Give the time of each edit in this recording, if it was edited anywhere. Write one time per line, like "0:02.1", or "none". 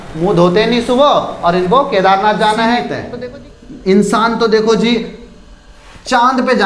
0:03.0

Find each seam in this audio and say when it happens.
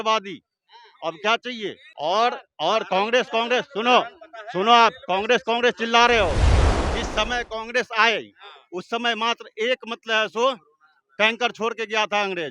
0:01.9

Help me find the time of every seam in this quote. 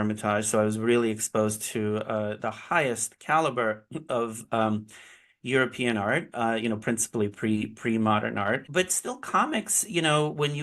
0:08.6

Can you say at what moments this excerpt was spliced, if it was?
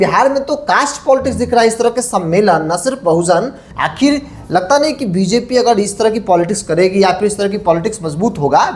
0:03.6

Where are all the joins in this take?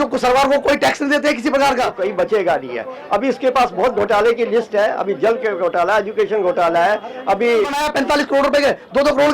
0:01.9
0:07.8

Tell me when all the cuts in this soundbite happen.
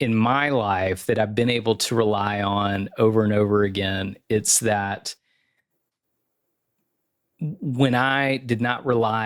none

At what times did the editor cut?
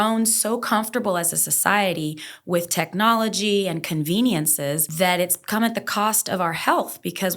0:04.9

